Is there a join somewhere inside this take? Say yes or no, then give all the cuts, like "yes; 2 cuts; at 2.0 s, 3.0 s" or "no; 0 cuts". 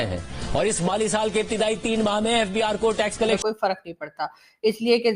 yes; 1 cut; at 3.4 s